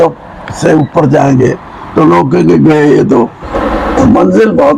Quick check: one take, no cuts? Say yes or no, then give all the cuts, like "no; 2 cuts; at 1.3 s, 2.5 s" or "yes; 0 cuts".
no; 1 cut; at 3.5 s